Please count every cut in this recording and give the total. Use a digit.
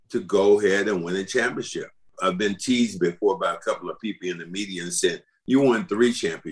2